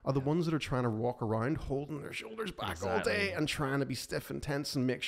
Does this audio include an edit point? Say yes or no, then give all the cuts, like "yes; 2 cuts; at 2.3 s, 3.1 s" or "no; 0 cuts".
no; 0 cuts